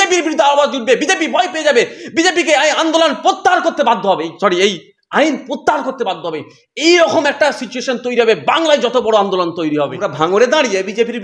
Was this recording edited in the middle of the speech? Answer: yes; 1 cut; at 10.0 s

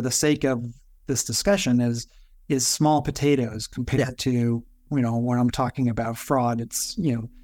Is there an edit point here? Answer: yes; 1 cut; at 4.8 s

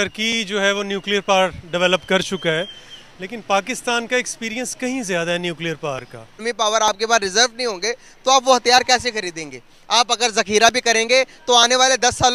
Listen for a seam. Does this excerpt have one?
yes; 1 cut; at 6.4 s

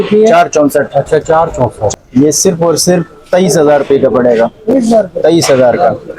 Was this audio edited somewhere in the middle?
yes; 1 cut; at 1.9 s

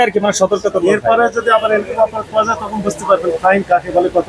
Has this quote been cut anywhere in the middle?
no; 0 cuts

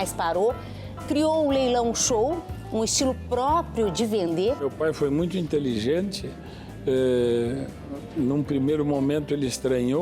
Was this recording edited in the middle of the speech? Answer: yes; 1 cut; at 4.7 s

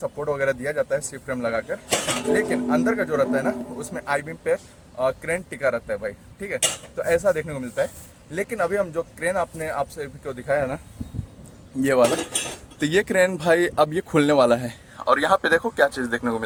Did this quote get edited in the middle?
no; 0 cuts

